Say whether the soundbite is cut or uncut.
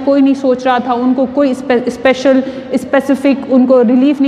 uncut